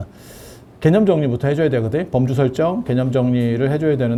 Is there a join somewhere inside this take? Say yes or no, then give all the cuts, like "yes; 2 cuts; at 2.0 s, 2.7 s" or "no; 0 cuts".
no; 0 cuts